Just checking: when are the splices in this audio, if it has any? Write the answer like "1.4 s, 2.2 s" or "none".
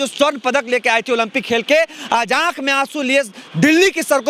none